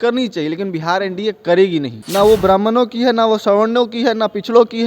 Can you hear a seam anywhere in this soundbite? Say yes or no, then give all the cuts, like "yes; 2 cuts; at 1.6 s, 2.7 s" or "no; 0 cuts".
yes; 1 cut; at 2.0 s